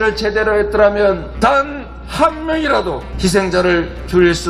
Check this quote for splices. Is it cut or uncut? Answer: cut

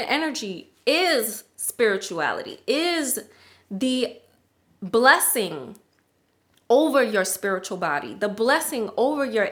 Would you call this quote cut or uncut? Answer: uncut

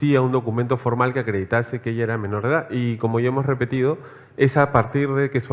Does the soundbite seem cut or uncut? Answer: uncut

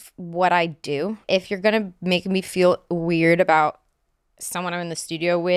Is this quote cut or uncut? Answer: cut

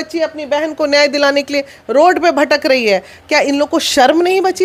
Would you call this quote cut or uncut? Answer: uncut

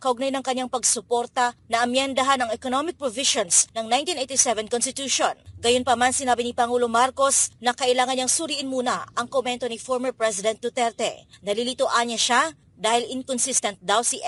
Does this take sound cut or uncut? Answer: uncut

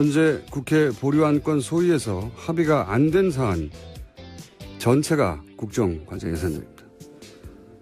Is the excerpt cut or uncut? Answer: cut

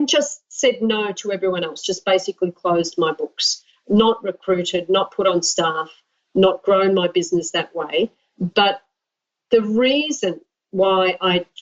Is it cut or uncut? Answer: uncut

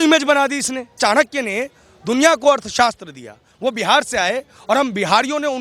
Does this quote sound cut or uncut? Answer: cut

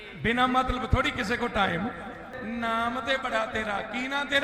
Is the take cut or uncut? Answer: cut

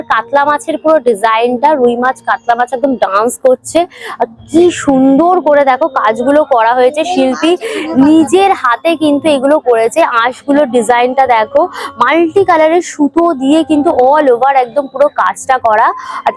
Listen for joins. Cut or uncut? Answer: uncut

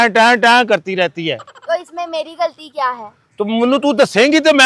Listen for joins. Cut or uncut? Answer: uncut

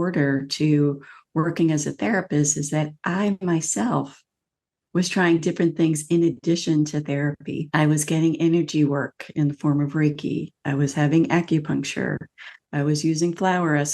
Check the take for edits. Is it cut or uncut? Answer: cut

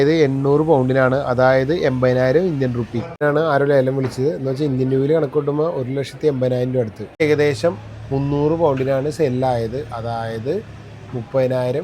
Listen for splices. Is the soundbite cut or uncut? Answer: cut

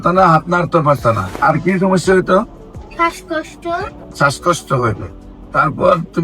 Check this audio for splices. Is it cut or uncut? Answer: cut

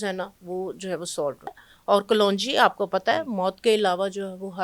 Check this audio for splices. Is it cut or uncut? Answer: cut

